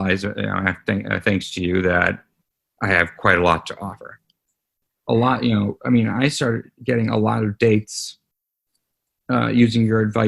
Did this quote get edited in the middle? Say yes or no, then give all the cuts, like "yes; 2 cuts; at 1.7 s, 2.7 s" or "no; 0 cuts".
yes; 1 cut; at 4.7 s